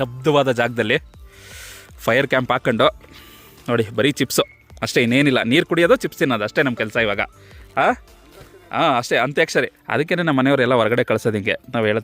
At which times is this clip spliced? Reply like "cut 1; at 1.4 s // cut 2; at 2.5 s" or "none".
cut 1; at 9.7 s